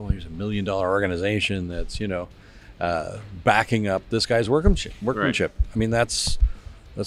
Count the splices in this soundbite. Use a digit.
0